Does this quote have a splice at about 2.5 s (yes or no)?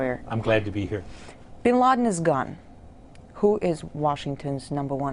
yes